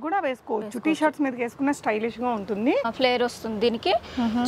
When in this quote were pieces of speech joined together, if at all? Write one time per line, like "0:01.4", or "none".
0:02.9